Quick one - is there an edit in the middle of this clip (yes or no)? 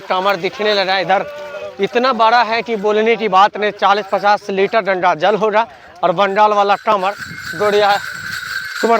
no